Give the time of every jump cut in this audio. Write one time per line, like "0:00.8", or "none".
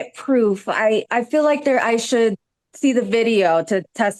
none